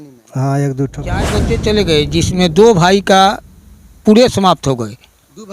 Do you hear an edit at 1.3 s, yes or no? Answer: yes